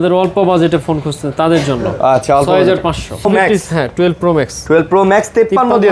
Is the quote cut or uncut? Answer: cut